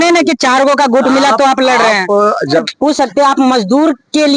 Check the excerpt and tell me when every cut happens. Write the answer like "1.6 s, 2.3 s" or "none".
2.7 s